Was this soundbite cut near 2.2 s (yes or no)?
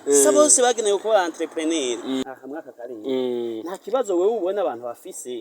yes